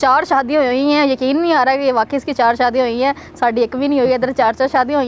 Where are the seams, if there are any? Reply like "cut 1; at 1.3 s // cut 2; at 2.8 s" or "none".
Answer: none